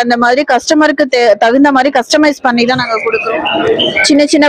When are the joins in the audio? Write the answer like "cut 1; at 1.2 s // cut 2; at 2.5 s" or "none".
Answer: cut 1; at 3.3 s

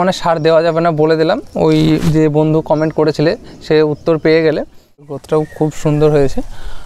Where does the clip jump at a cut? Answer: cut 1; at 5.2 s

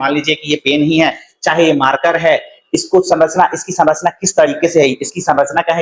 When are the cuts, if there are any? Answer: none

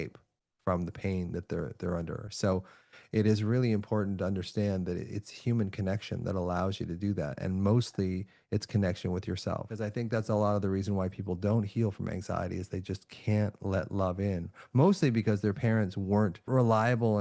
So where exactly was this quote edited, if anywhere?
cut 1; at 9.8 s // cut 2; at 16.5 s

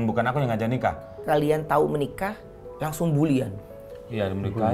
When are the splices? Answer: cut 1; at 1.1 s

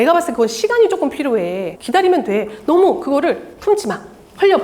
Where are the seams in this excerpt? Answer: cut 1; at 1.7 s

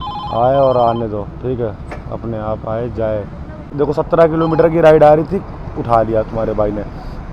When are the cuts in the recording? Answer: cut 1; at 3.7 s

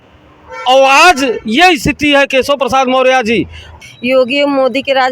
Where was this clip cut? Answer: cut 1; at 3.8 s

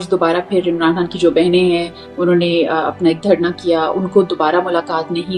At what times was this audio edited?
none

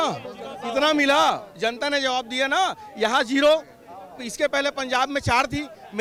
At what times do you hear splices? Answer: none

